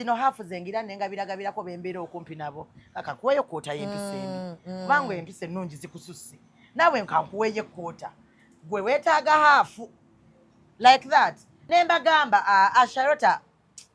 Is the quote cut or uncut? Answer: cut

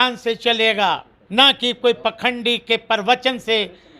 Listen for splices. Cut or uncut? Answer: cut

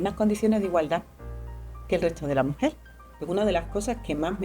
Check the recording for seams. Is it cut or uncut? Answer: cut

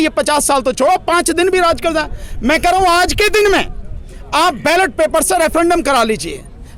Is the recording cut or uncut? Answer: uncut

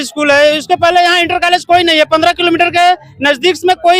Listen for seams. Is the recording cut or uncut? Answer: uncut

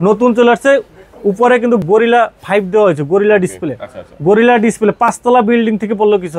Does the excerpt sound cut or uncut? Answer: uncut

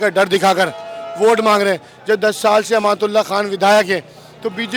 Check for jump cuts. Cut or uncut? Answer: uncut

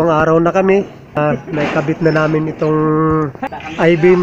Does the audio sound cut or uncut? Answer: cut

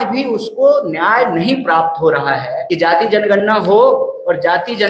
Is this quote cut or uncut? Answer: cut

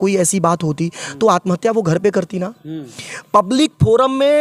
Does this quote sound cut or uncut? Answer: uncut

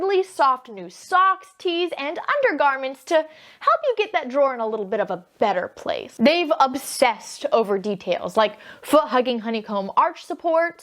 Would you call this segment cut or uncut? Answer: cut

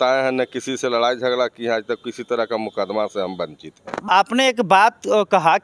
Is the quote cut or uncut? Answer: cut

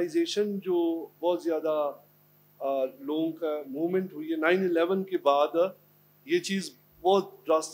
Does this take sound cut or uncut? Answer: uncut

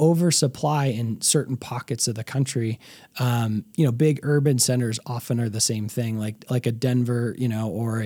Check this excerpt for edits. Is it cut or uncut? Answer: uncut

